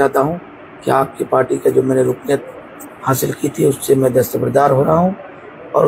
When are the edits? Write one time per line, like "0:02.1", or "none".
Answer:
none

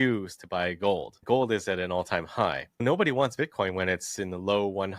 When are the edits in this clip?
0:01.2
0:02.8

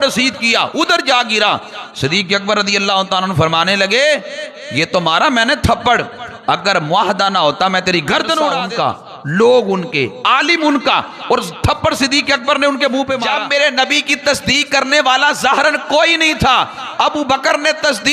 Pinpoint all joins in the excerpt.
0:08.6
0:13.3

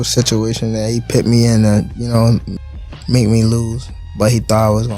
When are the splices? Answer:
0:02.5

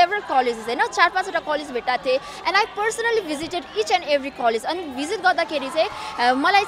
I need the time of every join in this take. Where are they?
none

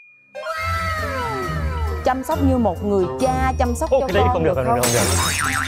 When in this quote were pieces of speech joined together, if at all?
none

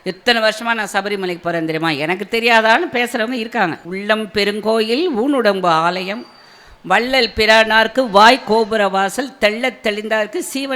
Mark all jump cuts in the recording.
0:03.8

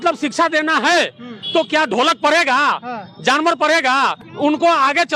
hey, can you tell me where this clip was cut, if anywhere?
0:04.2

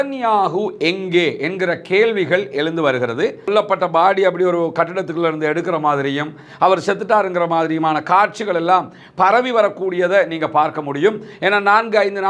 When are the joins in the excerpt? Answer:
0:03.5

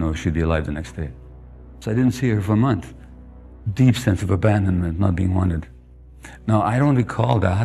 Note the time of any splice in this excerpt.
0:01.7

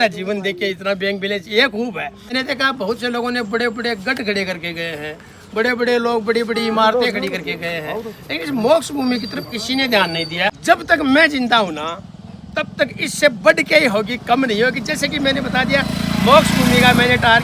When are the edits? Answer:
0:02.3
0:10.5

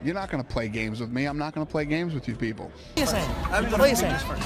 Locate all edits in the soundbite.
0:02.8

